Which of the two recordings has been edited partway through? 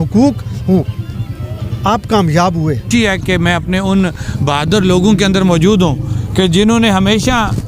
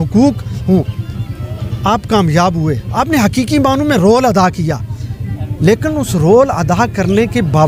first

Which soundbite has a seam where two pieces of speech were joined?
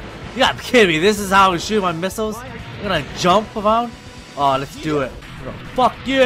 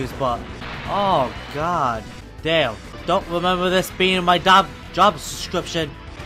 first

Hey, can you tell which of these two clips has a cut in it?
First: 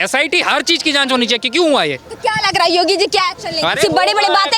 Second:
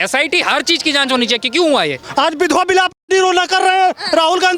second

